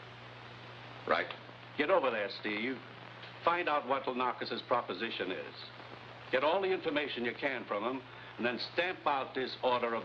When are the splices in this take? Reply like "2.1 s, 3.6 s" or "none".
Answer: none